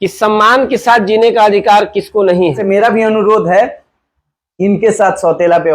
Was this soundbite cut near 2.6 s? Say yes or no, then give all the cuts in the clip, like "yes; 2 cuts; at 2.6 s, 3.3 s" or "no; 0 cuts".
yes; 1 cut; at 2.6 s